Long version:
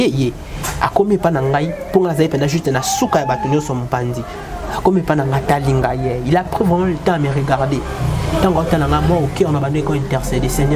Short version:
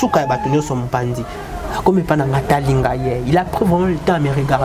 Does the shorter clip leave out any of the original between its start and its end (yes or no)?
no